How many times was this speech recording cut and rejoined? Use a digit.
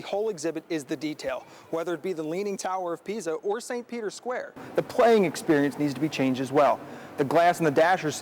1